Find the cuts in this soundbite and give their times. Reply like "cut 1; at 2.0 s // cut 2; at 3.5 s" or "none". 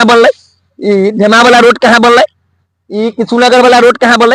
none